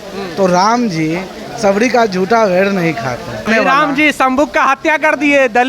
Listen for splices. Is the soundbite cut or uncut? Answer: cut